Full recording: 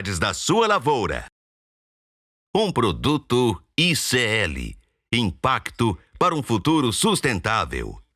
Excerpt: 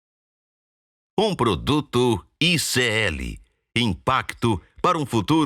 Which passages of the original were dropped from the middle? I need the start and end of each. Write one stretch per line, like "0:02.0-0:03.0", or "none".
none